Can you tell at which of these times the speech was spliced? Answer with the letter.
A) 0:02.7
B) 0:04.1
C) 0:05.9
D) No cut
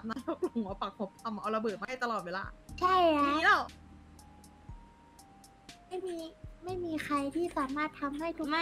D